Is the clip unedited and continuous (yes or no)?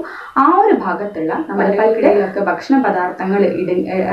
no